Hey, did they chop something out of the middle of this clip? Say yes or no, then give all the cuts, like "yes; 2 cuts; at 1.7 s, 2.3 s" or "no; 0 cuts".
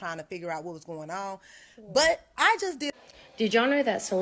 yes; 1 cut; at 2.9 s